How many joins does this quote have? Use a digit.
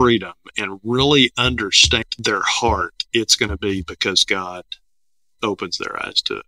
1